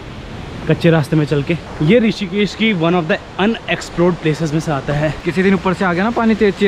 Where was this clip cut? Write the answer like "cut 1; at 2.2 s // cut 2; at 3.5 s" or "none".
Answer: cut 1; at 1.7 s // cut 2; at 5.2 s

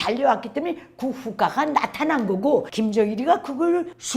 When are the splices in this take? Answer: cut 1; at 2.7 s

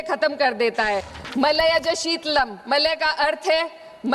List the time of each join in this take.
cut 1; at 1.1 s

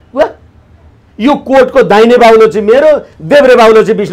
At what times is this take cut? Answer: none

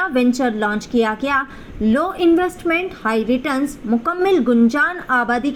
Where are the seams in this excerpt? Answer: none

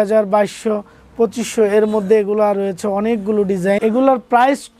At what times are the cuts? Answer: cut 1; at 3.8 s

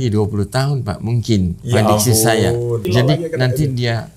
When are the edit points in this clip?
cut 1; at 2.8 s

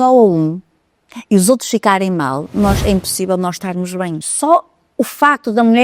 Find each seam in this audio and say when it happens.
cut 1; at 4.2 s

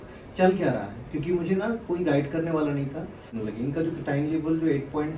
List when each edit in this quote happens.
cut 1; at 3.3 s

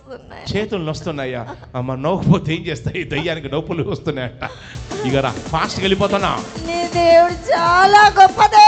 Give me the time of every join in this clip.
cut 1; at 4.7 s

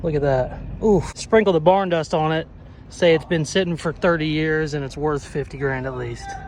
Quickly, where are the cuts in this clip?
cut 1; at 1.1 s

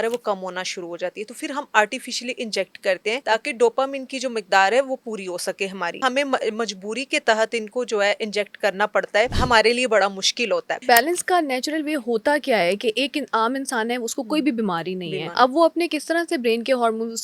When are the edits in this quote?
cut 1; at 3.2 s // cut 2; at 6.0 s // cut 3; at 9.4 s // cut 4; at 10.8 s // cut 5; at 15.2 s

